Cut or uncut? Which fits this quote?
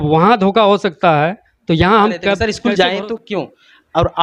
cut